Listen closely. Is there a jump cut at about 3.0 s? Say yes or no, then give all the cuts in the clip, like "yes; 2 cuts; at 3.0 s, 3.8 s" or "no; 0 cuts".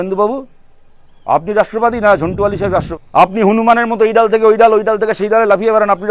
yes; 1 cut; at 3.0 s